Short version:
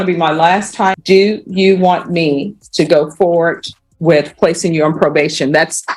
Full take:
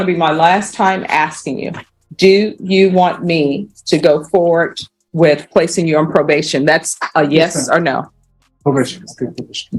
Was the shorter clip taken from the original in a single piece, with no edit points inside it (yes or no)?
no